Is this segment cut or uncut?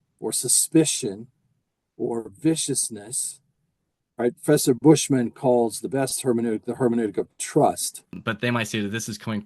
cut